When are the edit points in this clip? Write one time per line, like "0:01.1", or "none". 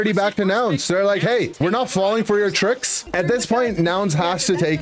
0:01.5
0:03.0